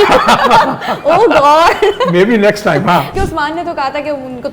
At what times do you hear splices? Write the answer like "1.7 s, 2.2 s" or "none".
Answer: 3.1 s